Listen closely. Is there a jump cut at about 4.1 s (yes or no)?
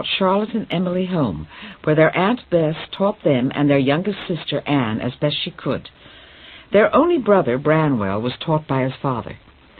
yes